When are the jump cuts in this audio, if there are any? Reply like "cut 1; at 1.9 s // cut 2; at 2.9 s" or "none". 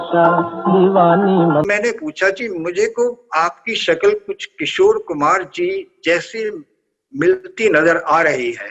cut 1; at 1.7 s